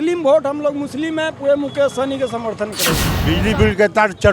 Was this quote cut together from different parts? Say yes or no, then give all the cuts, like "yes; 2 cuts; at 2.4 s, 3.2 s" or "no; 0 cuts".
yes; 1 cut; at 3.1 s